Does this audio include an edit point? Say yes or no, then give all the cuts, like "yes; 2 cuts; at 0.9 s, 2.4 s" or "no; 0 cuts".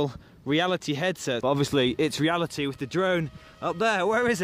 yes; 1 cut; at 1.4 s